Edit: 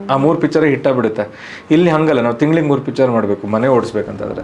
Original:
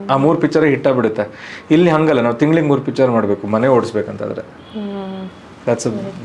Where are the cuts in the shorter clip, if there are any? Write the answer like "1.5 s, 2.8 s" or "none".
none